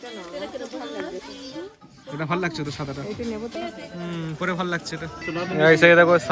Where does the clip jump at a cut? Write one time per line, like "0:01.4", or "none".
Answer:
0:03.5
0:05.3